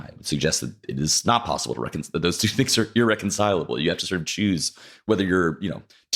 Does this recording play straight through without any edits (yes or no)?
yes